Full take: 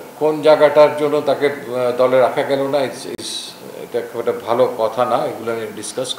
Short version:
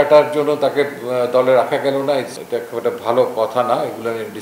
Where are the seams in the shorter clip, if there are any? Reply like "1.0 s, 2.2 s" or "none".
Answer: 2.4 s